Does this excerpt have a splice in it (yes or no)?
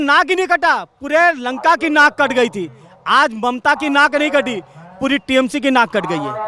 no